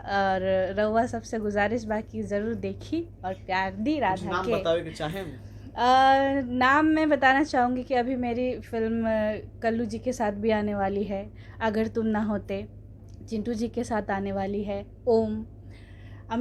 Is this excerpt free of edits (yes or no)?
yes